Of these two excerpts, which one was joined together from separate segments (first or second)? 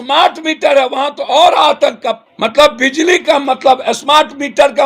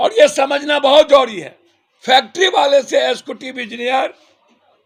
first